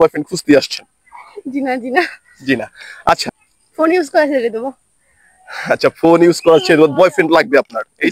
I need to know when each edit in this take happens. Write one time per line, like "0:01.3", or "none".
0:03.2